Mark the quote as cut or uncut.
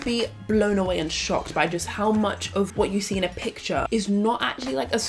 cut